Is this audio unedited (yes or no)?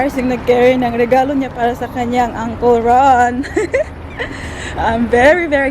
yes